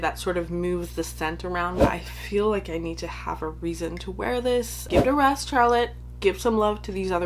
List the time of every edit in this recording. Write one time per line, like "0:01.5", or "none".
0:01.8
0:04.8